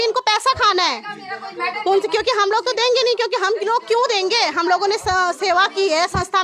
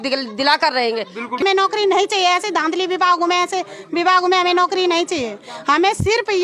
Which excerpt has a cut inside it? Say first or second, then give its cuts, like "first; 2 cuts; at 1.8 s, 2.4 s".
second; 1 cut; at 1.4 s